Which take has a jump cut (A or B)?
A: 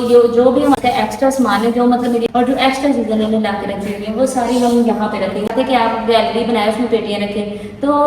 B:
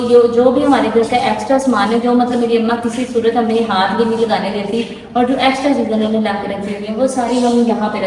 A